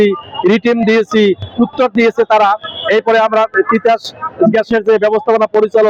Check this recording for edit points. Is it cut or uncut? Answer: uncut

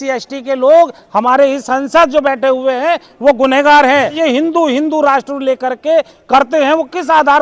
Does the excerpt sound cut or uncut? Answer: cut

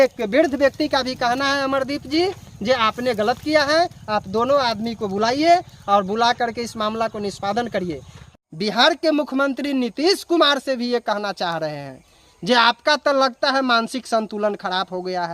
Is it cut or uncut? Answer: cut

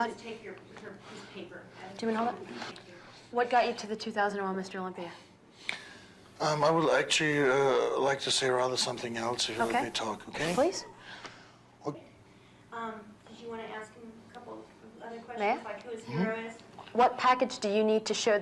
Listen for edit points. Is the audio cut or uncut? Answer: cut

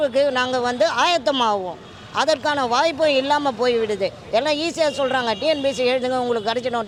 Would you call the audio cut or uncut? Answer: uncut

